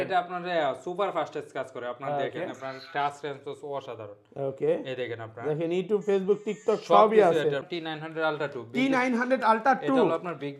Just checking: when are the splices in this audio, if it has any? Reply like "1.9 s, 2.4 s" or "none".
7.7 s